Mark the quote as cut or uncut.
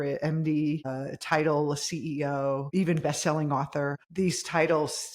cut